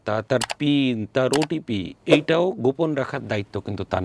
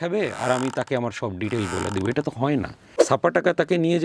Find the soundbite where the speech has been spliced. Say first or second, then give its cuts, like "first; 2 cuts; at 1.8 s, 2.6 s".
second; 1 cut; at 2.9 s